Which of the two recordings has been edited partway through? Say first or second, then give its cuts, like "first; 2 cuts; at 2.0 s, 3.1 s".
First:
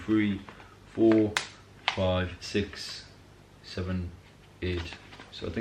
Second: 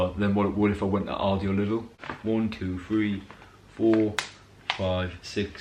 second; 1 cut; at 1.9 s